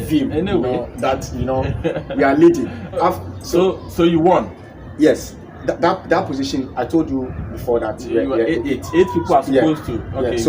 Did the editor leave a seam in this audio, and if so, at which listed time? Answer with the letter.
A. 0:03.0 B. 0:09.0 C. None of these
A